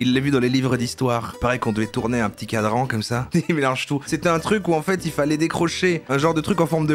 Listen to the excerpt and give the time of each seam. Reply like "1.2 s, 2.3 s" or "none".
3.3 s, 4.0 s